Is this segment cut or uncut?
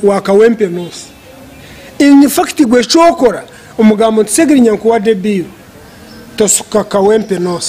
uncut